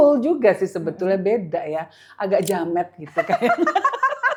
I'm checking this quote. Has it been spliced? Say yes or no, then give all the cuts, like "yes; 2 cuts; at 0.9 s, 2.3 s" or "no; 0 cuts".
no; 0 cuts